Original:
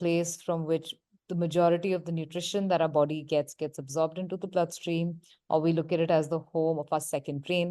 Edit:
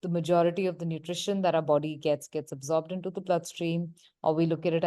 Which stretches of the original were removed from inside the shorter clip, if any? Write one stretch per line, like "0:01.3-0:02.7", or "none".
none